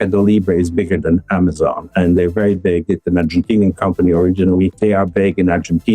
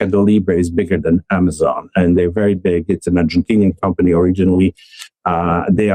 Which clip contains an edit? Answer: first; 1 cut; at 4.8 s

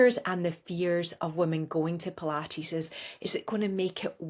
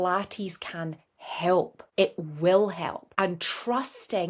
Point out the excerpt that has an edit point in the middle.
second; 2 cuts; at 1.8 s, 3.0 s

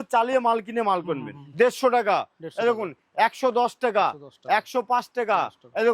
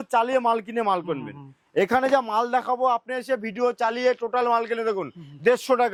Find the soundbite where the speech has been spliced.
first; 1 cut; at 1.4 s

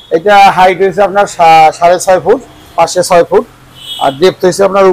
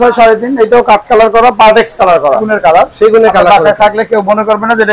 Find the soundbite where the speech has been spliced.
second; 1 cut; at 2.5 s

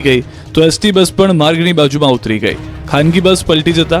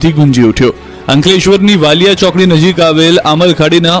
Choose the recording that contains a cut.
first; 1 cut; at 2.2 s

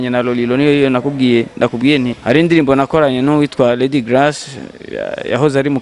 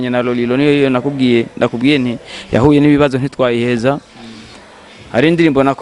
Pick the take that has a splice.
first; 1 cut; at 2.2 s

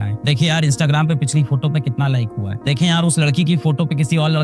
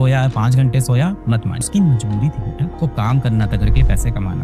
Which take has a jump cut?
second; 1 cut; at 1.6 s

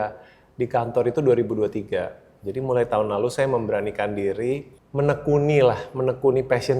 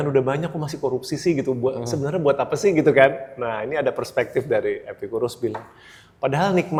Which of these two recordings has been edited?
first; 1 cut; at 4.8 s

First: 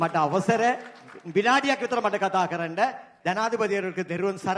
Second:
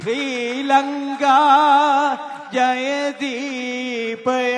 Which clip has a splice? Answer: first; 1 cut; at 3.1 s

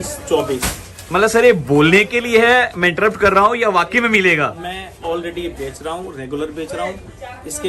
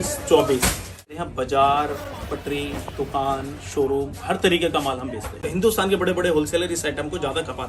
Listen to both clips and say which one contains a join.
second; 2 cuts; at 1.1 s, 5.4 s

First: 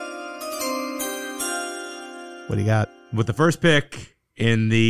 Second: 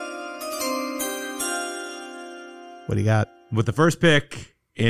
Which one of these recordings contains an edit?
first; 1 cut; at 2.4 s

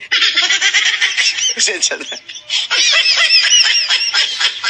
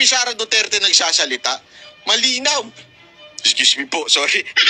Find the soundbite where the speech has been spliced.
first; 1 cut; at 1.3 s

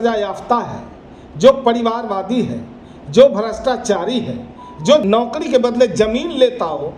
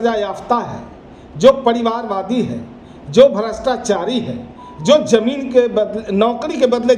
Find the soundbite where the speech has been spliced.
first; 1 cut; at 5.0 s

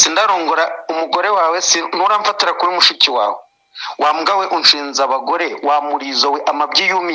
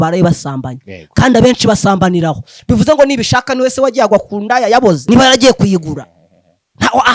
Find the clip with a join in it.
second; 1 cut; at 5.0 s

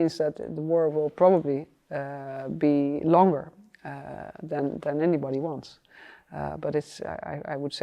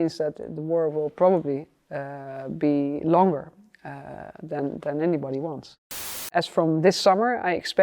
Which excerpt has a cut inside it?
second; 1 cut; at 6.3 s

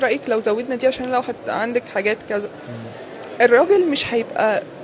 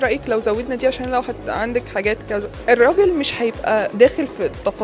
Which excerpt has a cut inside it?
second; 2 cuts; at 2.5 s, 3.9 s

